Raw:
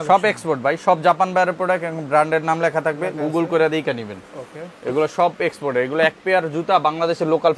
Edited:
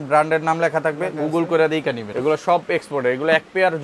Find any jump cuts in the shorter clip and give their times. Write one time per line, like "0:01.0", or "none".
0:02.1